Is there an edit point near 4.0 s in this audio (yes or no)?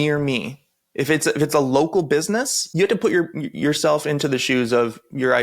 no